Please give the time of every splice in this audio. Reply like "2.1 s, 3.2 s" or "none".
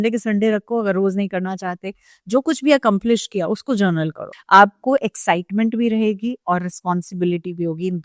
4.3 s

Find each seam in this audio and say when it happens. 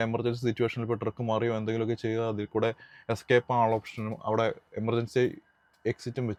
none

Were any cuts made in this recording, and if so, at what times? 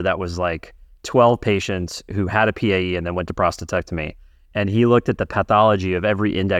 none

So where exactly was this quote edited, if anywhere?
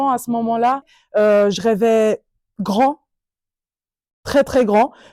1.0 s

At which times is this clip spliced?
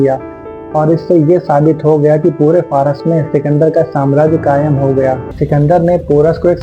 5.3 s

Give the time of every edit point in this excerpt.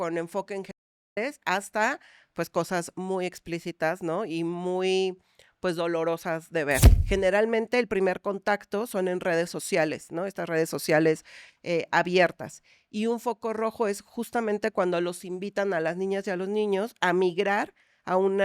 6.9 s

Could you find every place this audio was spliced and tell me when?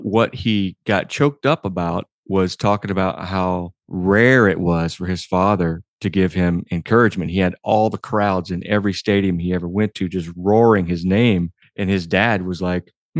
3.8 s, 11.6 s

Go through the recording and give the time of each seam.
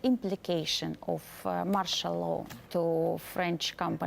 2.6 s

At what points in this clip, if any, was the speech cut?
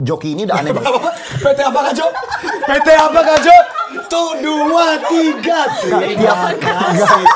none

